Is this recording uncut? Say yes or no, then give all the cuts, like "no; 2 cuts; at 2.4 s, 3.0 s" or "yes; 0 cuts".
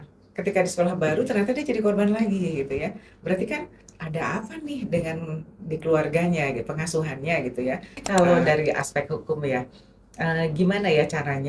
no; 1 cut; at 8.0 s